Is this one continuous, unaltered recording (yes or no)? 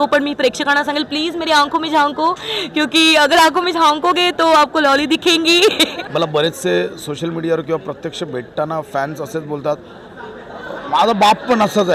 no